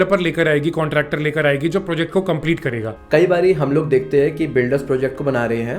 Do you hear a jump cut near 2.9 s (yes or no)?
yes